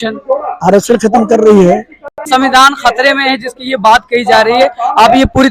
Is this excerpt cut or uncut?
cut